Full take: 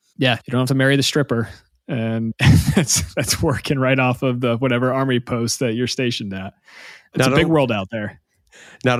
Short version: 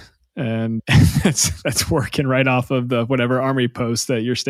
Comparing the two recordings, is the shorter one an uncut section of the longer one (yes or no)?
yes